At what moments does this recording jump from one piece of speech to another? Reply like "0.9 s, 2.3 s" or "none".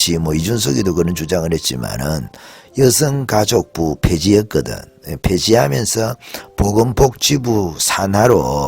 none